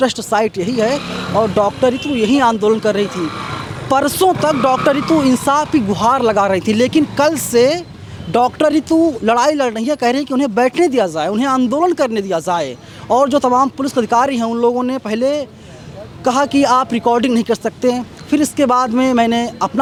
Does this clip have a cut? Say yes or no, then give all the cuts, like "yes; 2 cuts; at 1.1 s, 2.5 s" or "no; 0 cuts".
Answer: no; 0 cuts